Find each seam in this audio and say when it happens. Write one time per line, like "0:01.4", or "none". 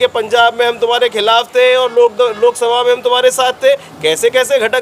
none